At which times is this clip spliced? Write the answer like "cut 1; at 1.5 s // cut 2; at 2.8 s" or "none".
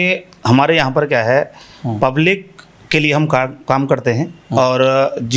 none

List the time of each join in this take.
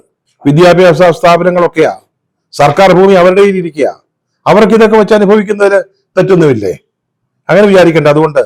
none

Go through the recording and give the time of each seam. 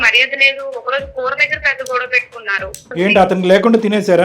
cut 1; at 2.9 s

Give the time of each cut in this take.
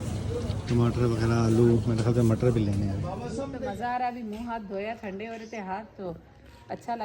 cut 1; at 3.1 s

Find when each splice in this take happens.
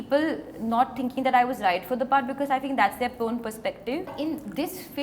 cut 1; at 4.1 s

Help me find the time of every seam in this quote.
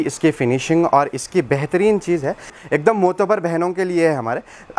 cut 1; at 2.5 s

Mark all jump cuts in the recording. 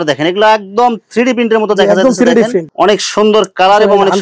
cut 1; at 2.6 s

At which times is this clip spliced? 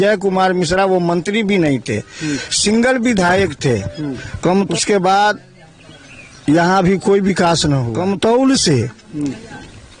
cut 1; at 4.7 s // cut 2; at 7.9 s

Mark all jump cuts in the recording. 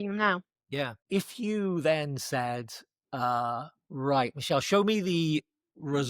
cut 1; at 1.0 s

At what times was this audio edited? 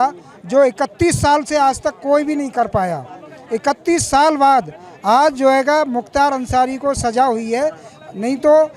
none

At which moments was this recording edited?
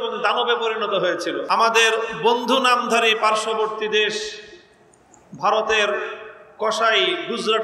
cut 1; at 1.4 s

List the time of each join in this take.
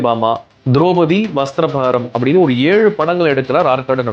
none

